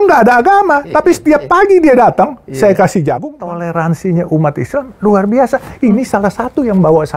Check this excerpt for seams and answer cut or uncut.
cut